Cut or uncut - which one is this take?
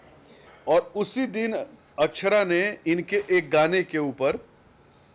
uncut